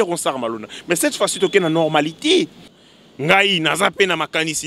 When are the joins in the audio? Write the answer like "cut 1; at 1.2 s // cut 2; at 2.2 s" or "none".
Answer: cut 1; at 2.8 s